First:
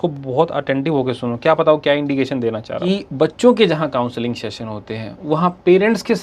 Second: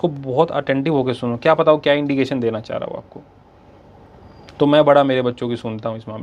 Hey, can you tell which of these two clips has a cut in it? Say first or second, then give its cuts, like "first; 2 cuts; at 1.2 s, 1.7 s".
first; 1 cut; at 2.7 s